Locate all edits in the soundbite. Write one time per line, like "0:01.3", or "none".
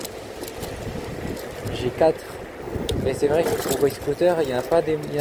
none